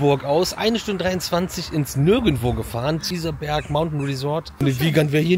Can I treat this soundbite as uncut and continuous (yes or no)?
no